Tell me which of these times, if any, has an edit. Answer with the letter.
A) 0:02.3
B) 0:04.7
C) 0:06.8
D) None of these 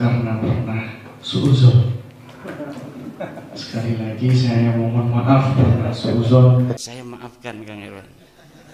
C